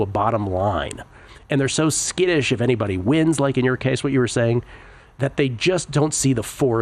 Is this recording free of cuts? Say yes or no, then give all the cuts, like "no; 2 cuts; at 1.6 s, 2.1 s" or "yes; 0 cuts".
yes; 0 cuts